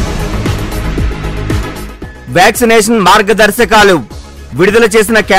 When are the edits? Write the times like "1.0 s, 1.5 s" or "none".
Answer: 1.7 s

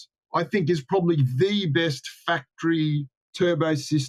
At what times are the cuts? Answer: none

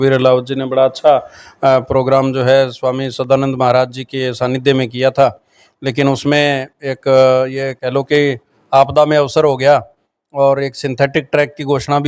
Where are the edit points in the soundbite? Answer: none

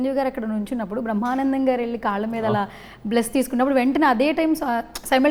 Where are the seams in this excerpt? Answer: none

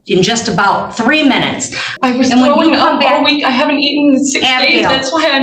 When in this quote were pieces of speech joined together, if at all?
1.9 s

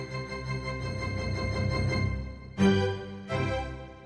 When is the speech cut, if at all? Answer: none

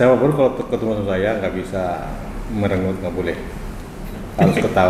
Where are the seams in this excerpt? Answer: none

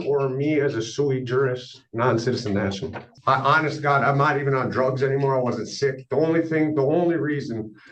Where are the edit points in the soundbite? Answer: 3.1 s

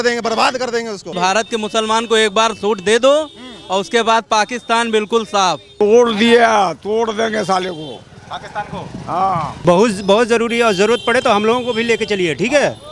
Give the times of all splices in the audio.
1.2 s, 5.7 s, 9.5 s

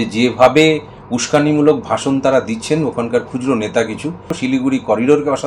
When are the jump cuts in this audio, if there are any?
4.3 s

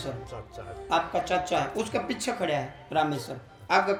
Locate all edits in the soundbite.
none

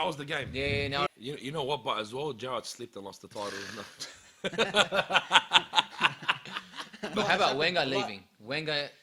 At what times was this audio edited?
1.1 s, 6.9 s

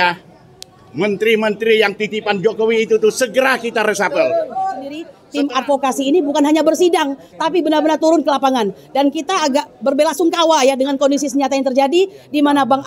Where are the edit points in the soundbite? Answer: 5.2 s

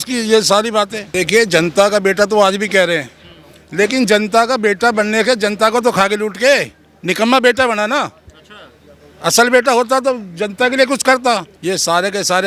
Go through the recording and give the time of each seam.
1.0 s, 11.5 s

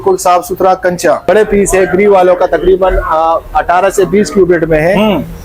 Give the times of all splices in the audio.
1.2 s

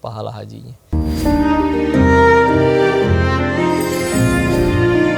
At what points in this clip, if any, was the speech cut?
0.9 s

